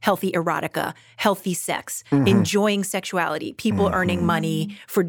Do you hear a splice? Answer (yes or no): no